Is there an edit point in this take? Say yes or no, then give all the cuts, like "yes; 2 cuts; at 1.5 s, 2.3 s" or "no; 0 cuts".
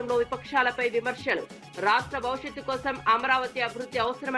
no; 0 cuts